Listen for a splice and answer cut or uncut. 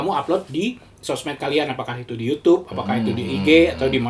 uncut